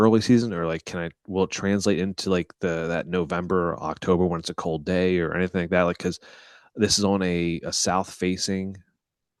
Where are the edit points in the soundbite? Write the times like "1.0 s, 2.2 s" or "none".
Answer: none